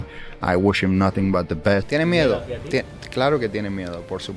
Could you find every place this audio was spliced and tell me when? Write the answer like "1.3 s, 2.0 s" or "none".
1.9 s